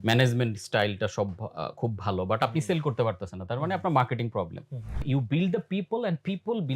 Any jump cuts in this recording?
yes; 1 cut; at 5.0 s

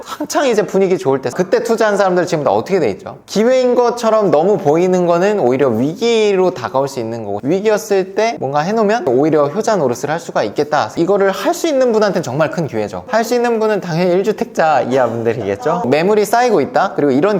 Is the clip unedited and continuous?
no; 4 cuts; at 1.3 s, 7.4 s, 10.9 s, 15.8 s

